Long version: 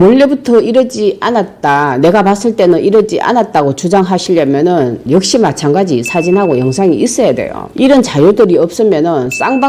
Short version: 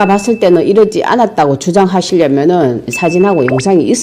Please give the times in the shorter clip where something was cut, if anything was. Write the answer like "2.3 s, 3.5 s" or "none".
2.9 s